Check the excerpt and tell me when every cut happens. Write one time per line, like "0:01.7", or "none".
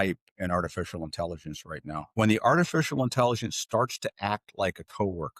0:02.1